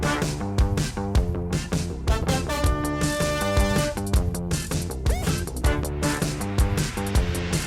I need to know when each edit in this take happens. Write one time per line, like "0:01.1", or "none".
0:06.3